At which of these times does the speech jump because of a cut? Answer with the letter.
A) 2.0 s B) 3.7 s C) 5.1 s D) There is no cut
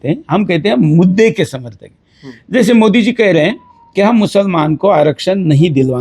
D